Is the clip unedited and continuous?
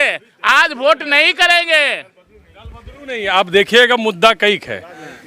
yes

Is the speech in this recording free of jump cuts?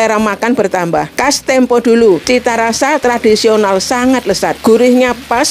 no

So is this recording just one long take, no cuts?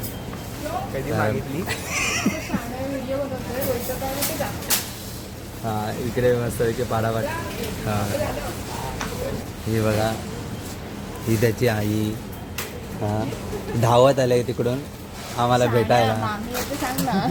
yes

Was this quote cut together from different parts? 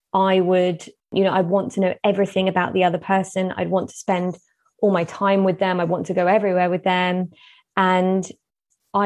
yes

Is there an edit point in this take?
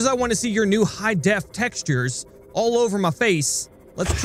no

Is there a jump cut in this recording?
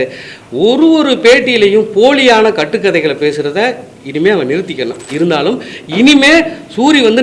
yes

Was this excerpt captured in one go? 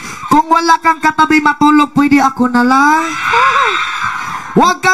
yes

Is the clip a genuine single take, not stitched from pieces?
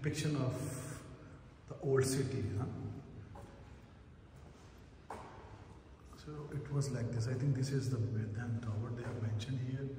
yes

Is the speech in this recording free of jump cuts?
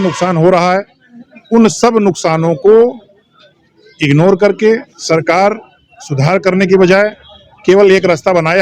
yes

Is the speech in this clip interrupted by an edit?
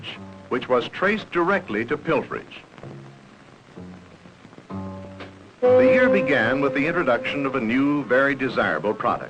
no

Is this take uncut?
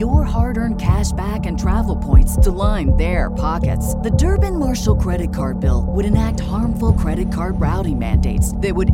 yes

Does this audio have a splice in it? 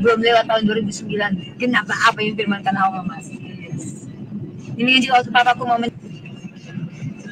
yes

